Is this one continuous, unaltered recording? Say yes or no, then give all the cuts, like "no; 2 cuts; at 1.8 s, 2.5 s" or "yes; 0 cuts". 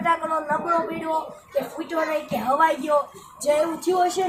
yes; 0 cuts